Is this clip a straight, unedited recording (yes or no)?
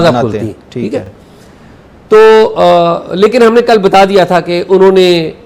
yes